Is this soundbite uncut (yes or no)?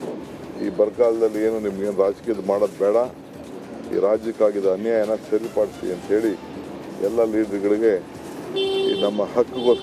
yes